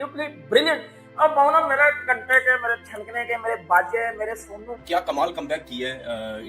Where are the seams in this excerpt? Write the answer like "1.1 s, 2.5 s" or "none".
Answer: 4.8 s